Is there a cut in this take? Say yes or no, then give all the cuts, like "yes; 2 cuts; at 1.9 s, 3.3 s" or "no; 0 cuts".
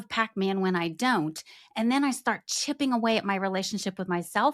no; 0 cuts